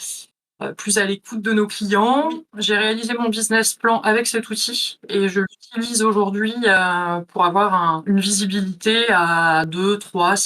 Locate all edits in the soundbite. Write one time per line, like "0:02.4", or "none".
0:02.5
0:08.0